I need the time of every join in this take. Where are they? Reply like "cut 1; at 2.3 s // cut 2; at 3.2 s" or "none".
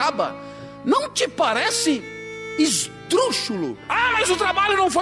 cut 1; at 3.8 s